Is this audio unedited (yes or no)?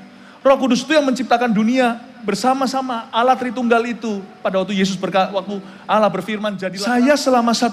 no